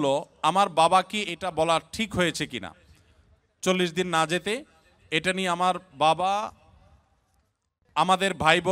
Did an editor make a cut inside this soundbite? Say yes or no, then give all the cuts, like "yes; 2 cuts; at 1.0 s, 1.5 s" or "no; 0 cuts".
no; 0 cuts